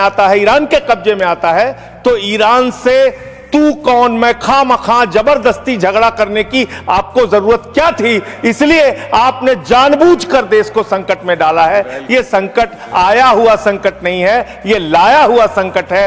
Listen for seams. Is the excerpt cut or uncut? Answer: uncut